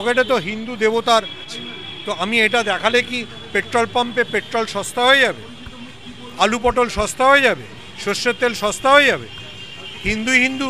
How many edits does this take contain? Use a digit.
1